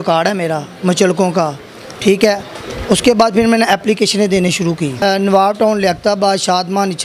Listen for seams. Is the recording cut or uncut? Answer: cut